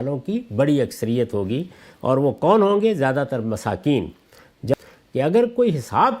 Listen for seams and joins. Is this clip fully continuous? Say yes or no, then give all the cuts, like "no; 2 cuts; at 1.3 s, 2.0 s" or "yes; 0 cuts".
no; 1 cut; at 4.7 s